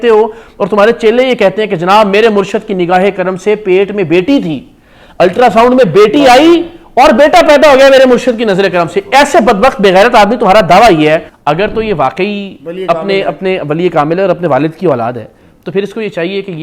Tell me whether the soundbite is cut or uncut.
cut